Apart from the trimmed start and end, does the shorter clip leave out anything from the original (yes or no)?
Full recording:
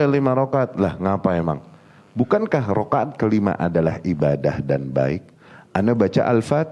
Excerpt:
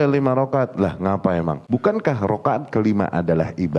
yes